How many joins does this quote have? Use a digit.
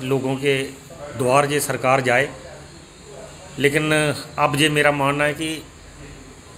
0